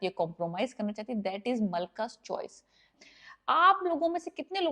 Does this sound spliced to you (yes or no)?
yes